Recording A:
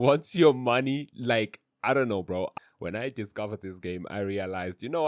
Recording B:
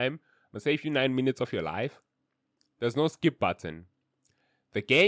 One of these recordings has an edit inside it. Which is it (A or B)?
A